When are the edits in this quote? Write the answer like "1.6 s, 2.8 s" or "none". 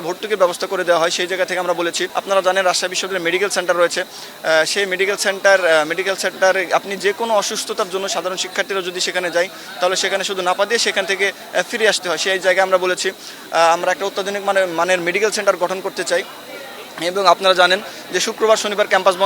2.1 s